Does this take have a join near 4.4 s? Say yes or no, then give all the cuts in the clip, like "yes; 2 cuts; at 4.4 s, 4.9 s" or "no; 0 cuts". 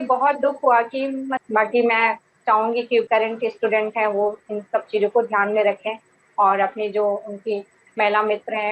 no; 1 cut; at 1.4 s